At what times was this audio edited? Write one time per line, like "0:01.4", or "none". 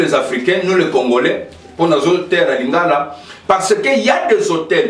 none